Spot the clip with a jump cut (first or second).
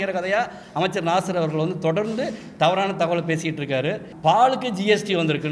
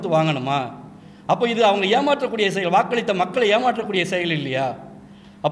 first